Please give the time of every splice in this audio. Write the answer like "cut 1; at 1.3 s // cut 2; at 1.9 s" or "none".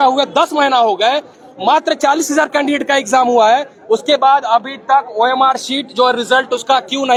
none